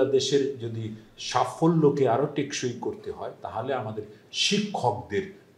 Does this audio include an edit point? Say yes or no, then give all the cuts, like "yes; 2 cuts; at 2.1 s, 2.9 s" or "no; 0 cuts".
no; 0 cuts